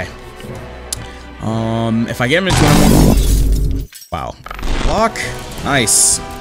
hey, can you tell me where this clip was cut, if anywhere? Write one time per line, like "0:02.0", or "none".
0:04.8